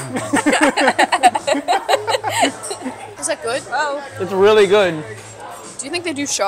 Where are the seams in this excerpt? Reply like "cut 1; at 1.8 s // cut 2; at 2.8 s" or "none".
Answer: none